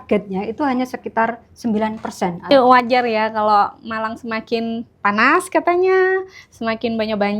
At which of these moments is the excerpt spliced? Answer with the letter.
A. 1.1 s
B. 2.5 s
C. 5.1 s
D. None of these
B